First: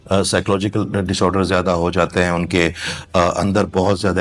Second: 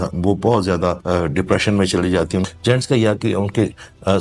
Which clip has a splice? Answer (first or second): second